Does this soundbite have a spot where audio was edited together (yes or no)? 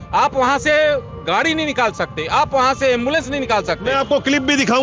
no